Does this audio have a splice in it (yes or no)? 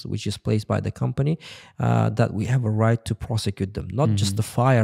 no